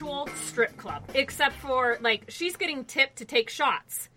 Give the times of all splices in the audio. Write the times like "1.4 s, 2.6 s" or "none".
1.1 s